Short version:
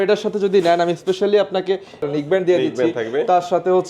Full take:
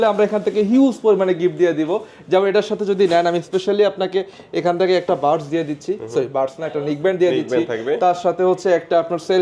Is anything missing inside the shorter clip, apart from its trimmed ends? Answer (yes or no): yes